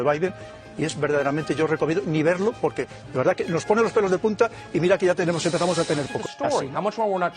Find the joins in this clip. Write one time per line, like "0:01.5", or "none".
0:06.2